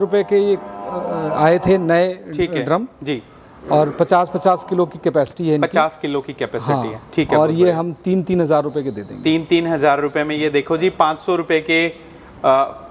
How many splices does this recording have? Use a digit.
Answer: 0